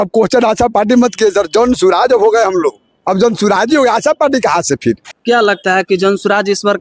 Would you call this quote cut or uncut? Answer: cut